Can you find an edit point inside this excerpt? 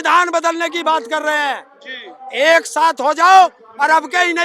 no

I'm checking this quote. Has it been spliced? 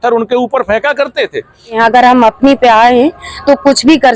yes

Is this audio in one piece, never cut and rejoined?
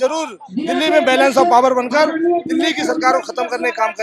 yes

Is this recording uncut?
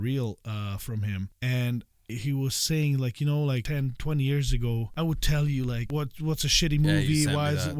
no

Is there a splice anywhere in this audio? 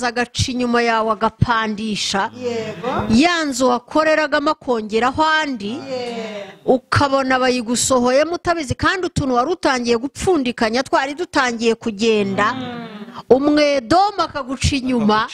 no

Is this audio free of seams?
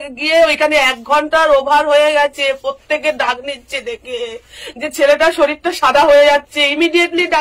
yes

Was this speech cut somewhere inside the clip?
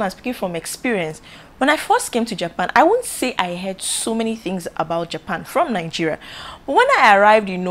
no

